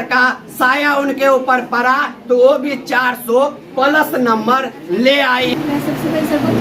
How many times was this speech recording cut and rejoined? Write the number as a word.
one